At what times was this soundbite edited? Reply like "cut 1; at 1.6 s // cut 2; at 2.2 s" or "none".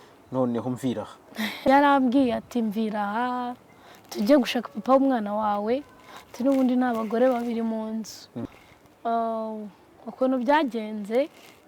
cut 1; at 1.6 s // cut 2; at 8.4 s